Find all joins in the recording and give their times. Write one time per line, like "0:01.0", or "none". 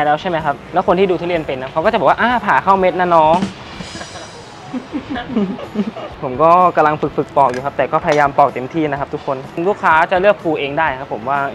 none